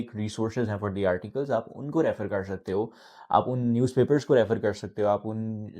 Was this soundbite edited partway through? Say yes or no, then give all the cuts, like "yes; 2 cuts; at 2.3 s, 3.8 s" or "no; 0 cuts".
no; 0 cuts